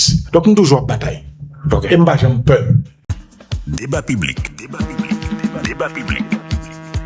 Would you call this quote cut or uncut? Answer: cut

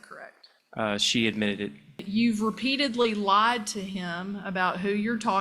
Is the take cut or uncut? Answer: cut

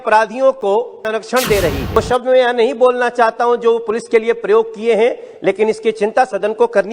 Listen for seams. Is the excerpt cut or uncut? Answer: cut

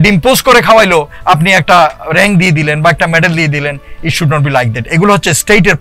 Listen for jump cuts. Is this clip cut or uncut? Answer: uncut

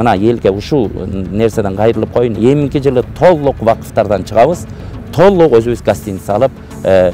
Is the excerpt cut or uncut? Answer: uncut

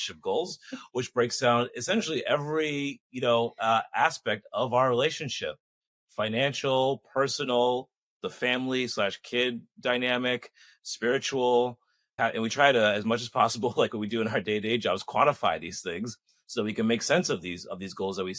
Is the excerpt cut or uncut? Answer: uncut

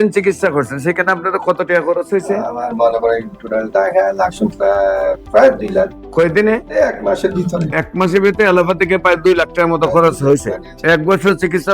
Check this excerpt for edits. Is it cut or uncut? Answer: uncut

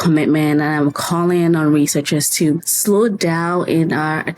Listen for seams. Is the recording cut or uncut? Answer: cut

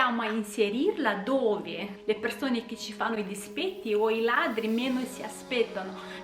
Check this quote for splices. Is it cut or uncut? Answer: cut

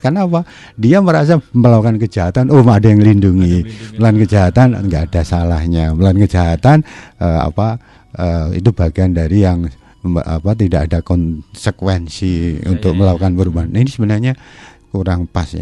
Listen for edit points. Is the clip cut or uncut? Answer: uncut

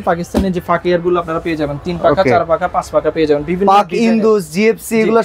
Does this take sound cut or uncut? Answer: uncut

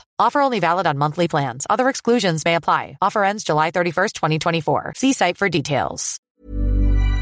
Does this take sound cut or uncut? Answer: cut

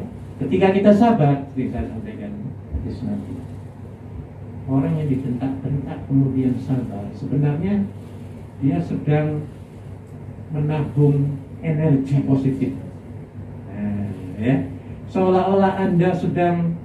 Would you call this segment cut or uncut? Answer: uncut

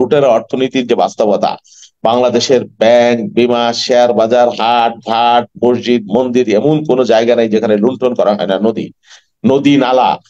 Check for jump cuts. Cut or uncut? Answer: uncut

